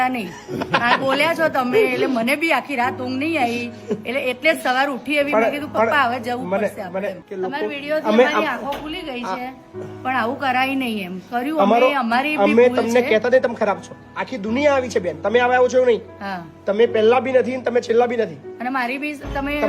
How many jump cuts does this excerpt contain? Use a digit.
1